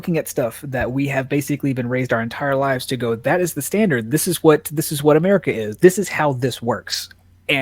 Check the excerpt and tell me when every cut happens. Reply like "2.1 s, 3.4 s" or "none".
5.7 s